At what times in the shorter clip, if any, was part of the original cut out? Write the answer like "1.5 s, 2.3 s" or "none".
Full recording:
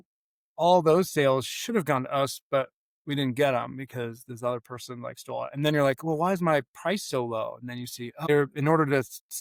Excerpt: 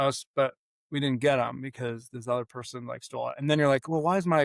none